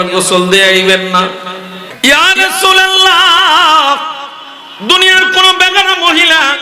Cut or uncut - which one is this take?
cut